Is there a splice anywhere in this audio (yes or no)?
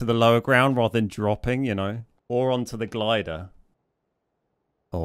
yes